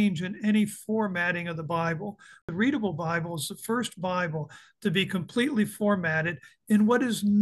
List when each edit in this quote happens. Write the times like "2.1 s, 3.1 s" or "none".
2.4 s